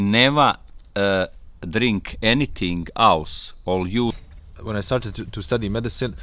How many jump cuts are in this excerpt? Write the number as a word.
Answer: one